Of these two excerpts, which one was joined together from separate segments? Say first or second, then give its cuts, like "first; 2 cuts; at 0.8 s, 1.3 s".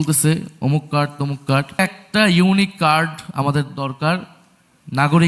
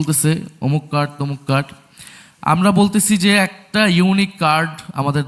first; 1 cut; at 1.8 s